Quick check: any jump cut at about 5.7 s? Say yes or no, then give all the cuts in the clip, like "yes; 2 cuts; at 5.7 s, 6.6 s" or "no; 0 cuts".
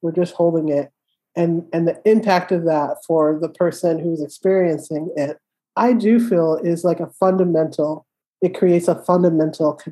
no; 0 cuts